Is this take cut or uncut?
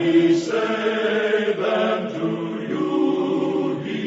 uncut